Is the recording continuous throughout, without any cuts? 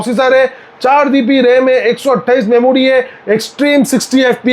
yes; 0 cuts

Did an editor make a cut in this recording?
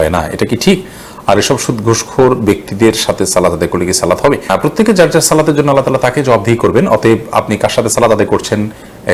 no; 0 cuts

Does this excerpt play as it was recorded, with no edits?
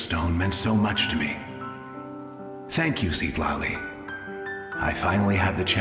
yes; 0 cuts

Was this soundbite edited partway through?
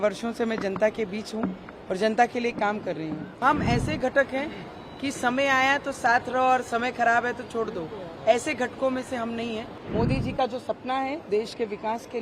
yes; 2 cuts; at 3.4 s, 9.8 s

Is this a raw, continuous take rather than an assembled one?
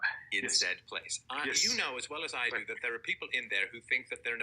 no; 1 cut; at 1.1 s

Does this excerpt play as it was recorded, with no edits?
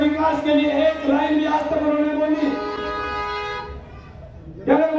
yes; 0 cuts

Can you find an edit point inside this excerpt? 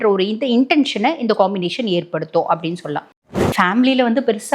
yes; 1 cut; at 3.0 s

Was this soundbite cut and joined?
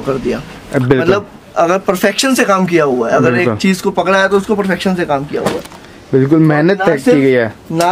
no; 0 cuts

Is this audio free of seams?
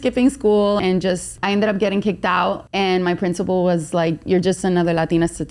no; 2 cuts; at 1.0 s, 2.6 s

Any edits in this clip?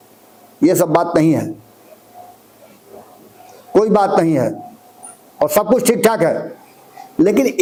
no; 0 cuts

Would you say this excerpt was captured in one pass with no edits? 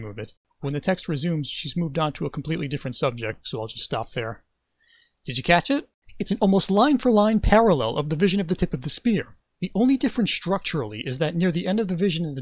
yes; 0 cuts

